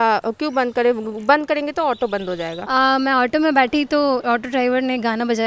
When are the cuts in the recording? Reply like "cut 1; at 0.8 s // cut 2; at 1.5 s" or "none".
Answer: cut 1; at 2.6 s